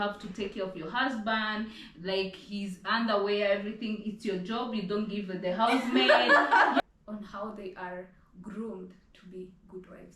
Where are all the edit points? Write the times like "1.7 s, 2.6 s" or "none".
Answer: 6.8 s, 8.6 s